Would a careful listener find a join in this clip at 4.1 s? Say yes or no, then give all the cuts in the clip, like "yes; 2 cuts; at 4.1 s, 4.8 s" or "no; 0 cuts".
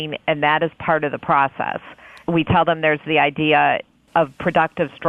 no; 1 cut; at 2.2 s